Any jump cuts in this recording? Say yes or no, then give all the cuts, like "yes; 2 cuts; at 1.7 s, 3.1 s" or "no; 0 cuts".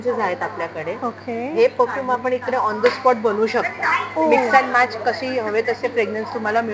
no; 0 cuts